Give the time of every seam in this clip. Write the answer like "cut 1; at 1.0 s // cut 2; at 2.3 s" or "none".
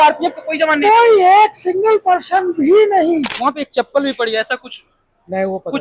cut 1; at 3.3 s